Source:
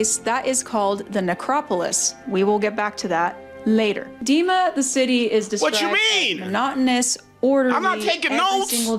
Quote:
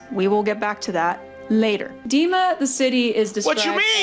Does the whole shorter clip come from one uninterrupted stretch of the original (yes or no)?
yes